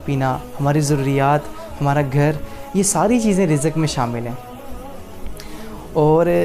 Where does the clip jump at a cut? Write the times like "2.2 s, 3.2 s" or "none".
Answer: none